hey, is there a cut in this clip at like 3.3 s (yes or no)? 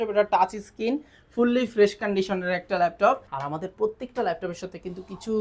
yes